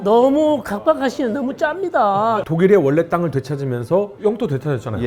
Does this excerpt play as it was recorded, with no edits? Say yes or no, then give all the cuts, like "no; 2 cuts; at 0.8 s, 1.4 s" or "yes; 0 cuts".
no; 2 cuts; at 2.3 s, 4.1 s